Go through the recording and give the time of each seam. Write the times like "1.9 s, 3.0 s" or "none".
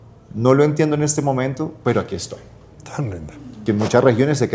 3.6 s